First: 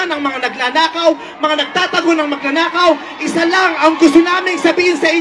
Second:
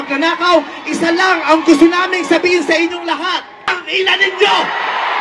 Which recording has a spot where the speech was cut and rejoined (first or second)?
second